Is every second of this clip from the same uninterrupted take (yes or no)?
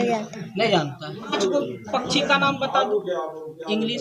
no